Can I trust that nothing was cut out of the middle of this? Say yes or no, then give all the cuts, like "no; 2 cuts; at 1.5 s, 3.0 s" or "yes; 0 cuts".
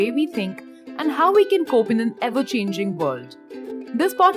yes; 0 cuts